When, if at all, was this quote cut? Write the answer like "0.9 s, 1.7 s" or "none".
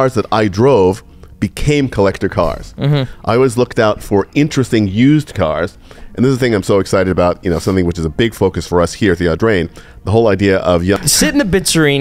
11.0 s